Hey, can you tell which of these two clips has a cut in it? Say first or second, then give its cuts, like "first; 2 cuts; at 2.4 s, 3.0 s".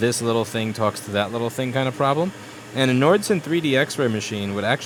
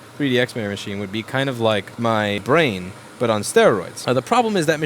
second; 2 cuts; at 2.4 s, 3.9 s